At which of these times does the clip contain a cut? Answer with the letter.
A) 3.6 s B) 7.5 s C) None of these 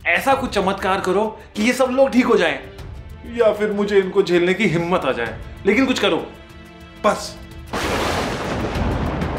B